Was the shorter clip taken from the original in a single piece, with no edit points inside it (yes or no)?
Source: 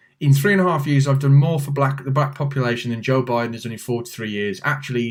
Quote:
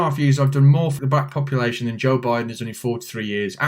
no